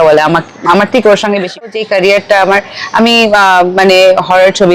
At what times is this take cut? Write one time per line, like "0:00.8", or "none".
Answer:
0:01.7

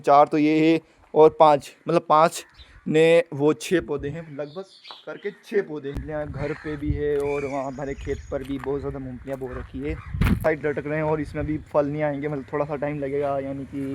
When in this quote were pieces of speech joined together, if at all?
0:06.0
0:10.4

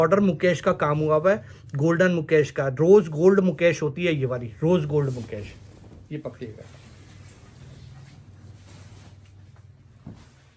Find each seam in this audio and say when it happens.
none

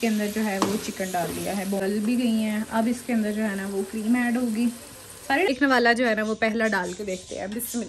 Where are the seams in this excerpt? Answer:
0:01.8
0:05.5

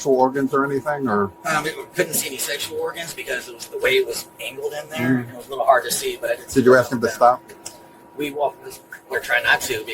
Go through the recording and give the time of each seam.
none

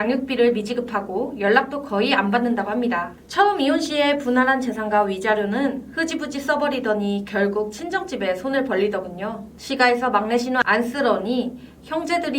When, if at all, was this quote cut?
0:03.2
0:09.5

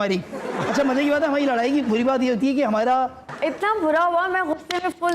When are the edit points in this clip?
0:03.3

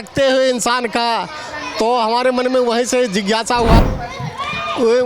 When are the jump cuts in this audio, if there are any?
0:03.8

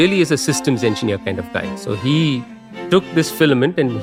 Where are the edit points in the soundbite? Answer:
none

